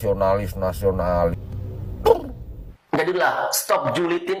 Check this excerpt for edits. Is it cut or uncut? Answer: cut